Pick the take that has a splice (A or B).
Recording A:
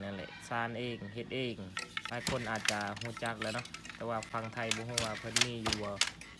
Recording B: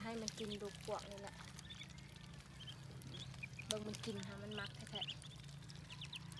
A